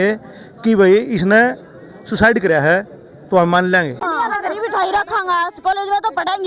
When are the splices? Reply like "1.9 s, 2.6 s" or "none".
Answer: 4.0 s